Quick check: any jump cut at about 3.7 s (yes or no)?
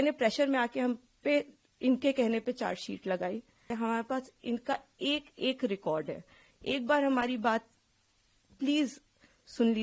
yes